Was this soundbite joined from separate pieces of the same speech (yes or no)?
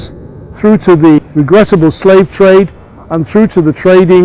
yes